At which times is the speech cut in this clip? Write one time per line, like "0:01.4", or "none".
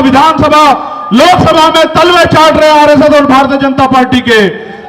none